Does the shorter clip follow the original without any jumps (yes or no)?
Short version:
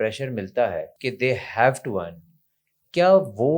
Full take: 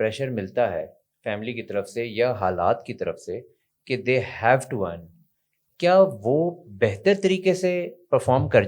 no